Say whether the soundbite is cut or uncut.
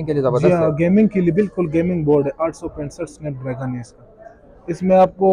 uncut